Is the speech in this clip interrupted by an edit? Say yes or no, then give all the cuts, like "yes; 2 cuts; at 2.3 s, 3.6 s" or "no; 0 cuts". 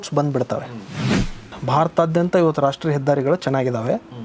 yes; 1 cut; at 1.3 s